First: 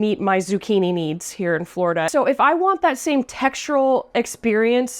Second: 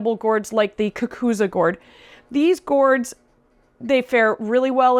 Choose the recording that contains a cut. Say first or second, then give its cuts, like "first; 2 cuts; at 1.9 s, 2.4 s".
first; 1 cut; at 2.1 s